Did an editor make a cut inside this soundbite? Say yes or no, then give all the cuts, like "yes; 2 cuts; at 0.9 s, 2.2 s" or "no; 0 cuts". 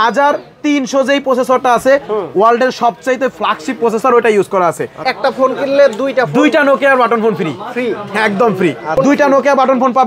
yes; 2 cuts; at 5.1 s, 9.0 s